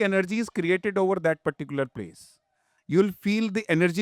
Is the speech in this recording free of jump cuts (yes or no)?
no